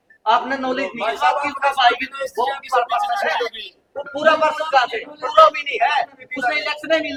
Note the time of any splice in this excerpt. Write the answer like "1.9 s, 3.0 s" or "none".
none

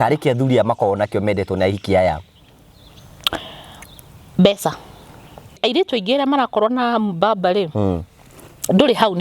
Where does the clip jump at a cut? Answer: 5.6 s

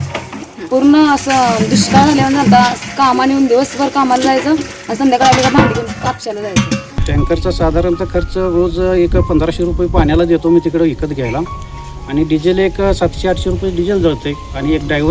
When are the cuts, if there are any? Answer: 6.8 s

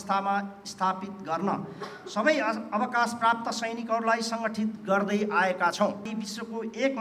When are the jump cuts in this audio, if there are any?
6.1 s

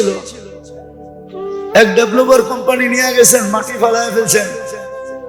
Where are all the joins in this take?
none

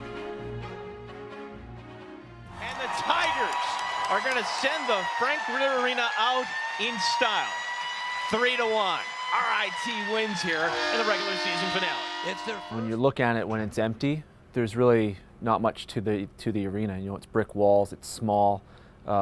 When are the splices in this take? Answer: 1.4 s

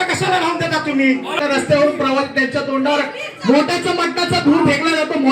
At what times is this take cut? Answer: 1.3 s

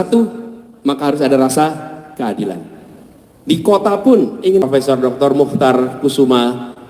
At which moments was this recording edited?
4.7 s

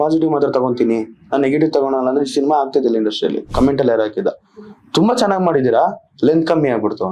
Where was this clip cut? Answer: 3.4 s

